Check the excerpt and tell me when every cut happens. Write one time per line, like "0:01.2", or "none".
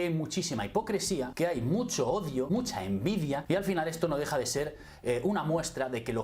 0:01.3
0:02.5
0:03.4